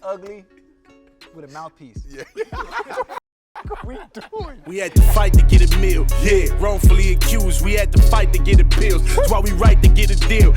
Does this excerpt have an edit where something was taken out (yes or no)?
yes